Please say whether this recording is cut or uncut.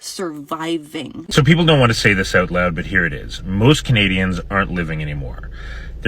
cut